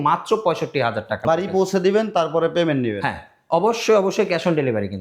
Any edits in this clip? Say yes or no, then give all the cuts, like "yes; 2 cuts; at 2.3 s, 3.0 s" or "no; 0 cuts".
yes; 1 cut; at 1.2 s